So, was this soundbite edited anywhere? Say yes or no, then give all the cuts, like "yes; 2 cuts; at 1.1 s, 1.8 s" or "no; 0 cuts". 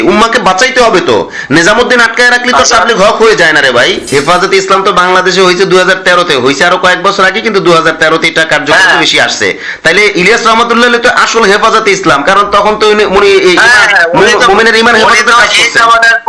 yes; 1 cut; at 4.1 s